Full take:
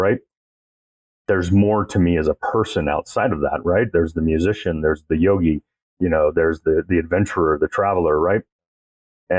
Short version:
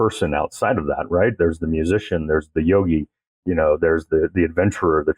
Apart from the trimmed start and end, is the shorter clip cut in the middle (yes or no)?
no